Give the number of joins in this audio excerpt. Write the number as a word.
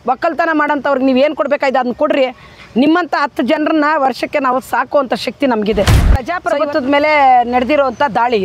one